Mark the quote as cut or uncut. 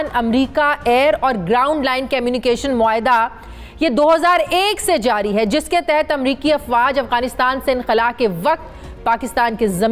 uncut